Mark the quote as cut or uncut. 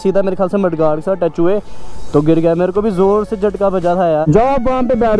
uncut